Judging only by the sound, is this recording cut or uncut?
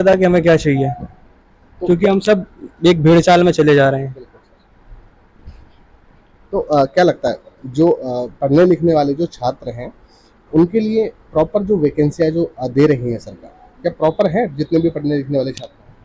uncut